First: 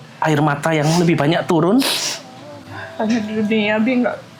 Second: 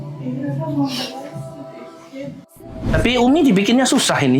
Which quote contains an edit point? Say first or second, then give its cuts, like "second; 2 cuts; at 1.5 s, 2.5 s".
second; 1 cut; at 2.9 s